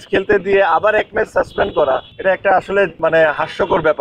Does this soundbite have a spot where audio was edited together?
yes; 2 cuts; at 2.1 s, 2.9 s

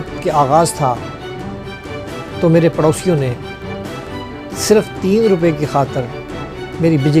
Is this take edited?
no; 0 cuts

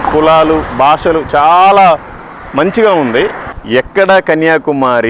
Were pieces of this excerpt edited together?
yes; 1 cut; at 3.9 s

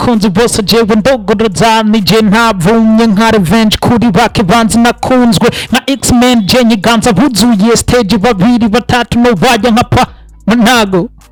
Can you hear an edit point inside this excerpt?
no; 0 cuts

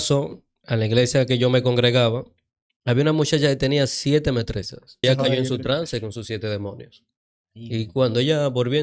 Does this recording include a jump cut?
yes; 1 cut; at 5.0 s

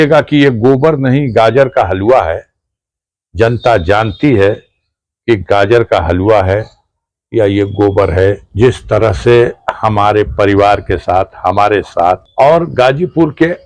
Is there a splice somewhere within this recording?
yes; 2 cuts; at 8.5 s, 12.3 s

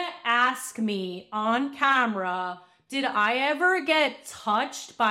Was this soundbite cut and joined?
no; 0 cuts

